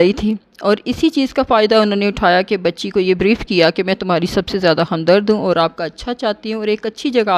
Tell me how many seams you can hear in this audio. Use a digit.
0